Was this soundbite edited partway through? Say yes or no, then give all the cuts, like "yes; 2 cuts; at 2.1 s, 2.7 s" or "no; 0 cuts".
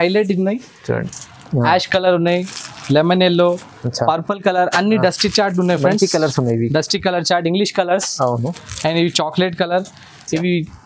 yes; 1 cut; at 1.1 s